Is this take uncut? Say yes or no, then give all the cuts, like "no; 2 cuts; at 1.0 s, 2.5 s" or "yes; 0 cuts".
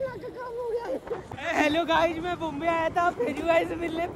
yes; 0 cuts